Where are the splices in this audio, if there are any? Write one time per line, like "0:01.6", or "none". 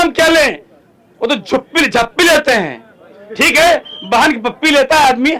none